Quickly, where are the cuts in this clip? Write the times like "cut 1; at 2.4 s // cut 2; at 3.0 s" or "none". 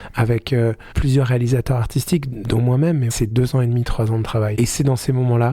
cut 1; at 0.9 s // cut 2; at 3.2 s // cut 3; at 4.5 s